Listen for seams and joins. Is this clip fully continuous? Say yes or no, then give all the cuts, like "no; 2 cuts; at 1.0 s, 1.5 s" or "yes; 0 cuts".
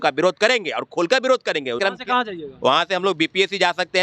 no; 1 cut; at 1.8 s